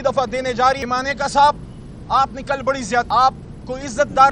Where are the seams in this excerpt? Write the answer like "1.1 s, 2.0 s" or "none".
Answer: 0.8 s, 3.1 s